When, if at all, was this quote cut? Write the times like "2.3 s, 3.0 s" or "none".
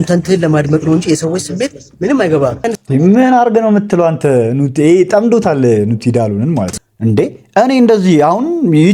2.6 s, 6.7 s